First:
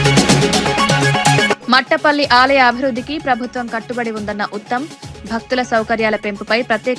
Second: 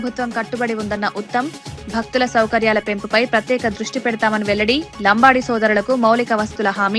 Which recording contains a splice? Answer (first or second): first